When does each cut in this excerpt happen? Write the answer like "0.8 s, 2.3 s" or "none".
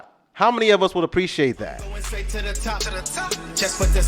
1.9 s